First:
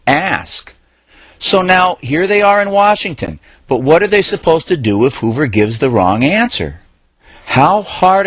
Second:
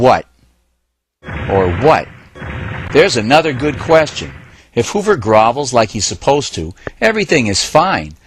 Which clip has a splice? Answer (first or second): second